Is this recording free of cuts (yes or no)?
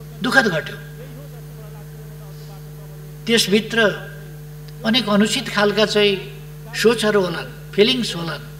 yes